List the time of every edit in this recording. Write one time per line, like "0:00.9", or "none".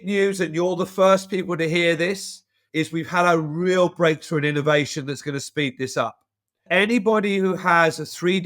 0:06.7